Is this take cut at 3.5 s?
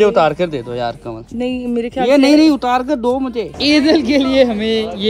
yes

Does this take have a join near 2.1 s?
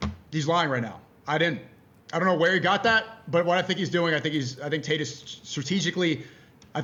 no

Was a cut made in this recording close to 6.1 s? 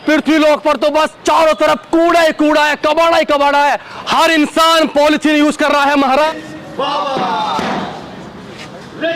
yes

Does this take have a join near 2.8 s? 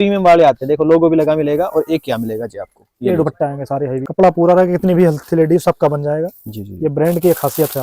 no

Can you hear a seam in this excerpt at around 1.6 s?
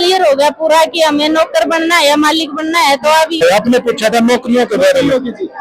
no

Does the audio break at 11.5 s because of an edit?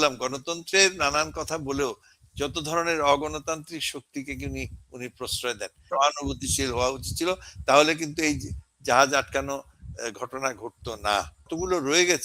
yes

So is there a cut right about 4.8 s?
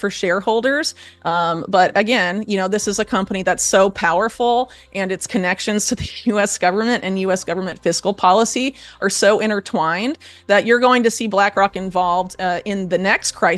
no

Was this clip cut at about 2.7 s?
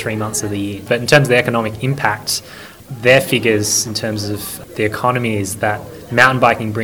yes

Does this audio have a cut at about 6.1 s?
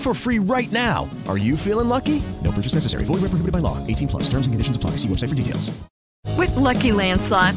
yes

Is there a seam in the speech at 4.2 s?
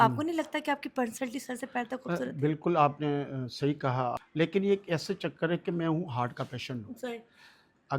yes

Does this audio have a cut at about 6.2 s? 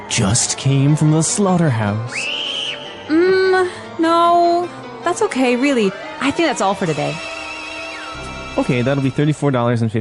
no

